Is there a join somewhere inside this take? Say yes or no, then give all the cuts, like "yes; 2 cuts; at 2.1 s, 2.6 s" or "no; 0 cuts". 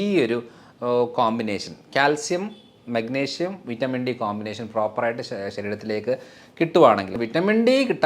yes; 1 cut; at 7.1 s